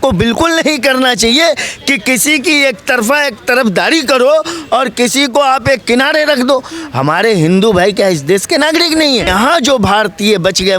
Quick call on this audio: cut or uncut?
cut